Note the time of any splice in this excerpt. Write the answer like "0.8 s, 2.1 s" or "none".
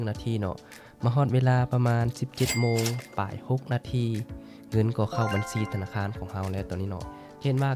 none